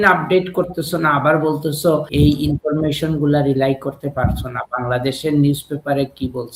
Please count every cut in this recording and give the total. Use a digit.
1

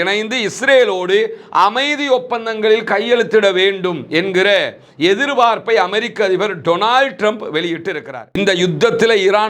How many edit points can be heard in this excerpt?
1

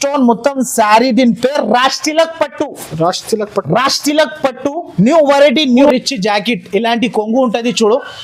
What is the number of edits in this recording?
1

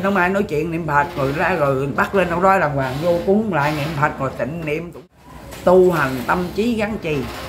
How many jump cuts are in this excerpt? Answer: 1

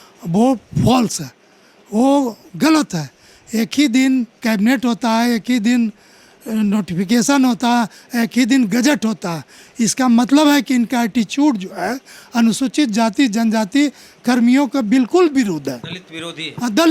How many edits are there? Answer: 0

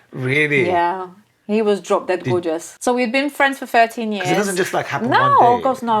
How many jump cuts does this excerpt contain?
1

